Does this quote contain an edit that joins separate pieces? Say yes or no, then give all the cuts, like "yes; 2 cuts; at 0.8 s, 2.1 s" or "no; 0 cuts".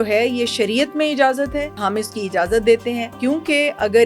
yes; 2 cuts; at 1.8 s, 3.1 s